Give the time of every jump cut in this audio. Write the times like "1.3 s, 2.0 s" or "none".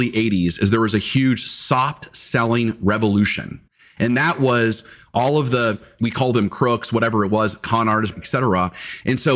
6.0 s